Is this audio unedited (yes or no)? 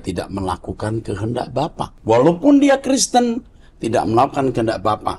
no